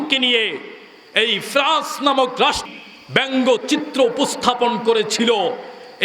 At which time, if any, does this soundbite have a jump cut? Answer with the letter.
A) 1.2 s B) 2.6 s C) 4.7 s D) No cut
B